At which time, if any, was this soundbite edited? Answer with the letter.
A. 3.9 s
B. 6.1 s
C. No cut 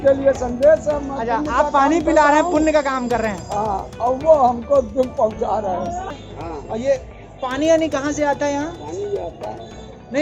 B